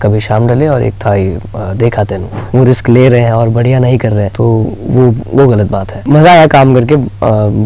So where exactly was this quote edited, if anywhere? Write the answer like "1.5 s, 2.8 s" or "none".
2.3 s, 4.3 s, 5.9 s